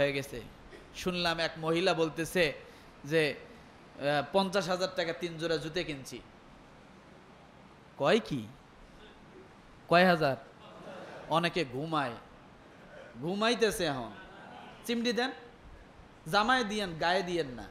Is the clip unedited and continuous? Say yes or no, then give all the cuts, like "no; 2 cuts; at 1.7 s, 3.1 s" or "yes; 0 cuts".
yes; 0 cuts